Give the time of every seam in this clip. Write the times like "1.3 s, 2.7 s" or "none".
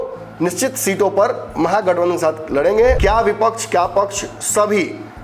3.0 s